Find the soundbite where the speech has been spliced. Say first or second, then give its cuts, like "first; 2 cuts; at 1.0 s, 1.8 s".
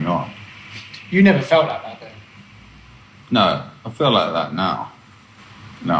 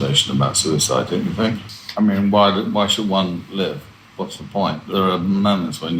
second; 2 cuts; at 1.6 s, 4.8 s